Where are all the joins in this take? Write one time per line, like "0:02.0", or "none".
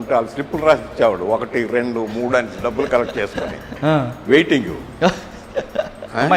none